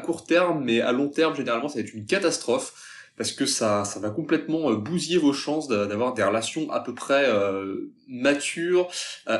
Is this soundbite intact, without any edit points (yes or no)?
yes